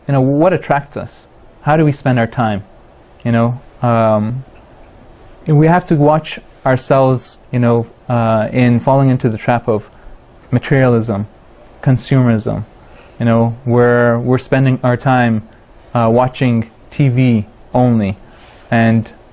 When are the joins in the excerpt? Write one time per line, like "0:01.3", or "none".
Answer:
0:11.3